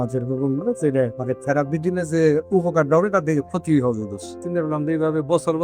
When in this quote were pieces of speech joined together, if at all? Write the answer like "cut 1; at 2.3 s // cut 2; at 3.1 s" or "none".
cut 1; at 1.2 s // cut 2; at 4.4 s